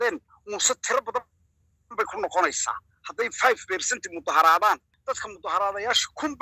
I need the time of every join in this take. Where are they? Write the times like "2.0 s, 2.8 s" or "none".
4.9 s